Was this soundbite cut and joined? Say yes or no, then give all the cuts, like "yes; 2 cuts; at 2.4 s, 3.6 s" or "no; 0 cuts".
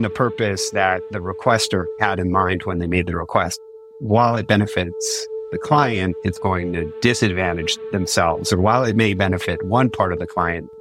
yes; 2 cuts; at 2.0 s, 3.6 s